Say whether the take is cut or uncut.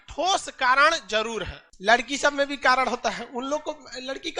cut